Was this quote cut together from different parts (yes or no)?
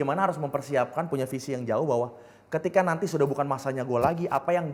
no